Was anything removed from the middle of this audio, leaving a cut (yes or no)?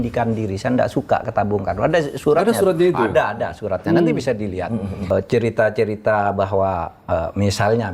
yes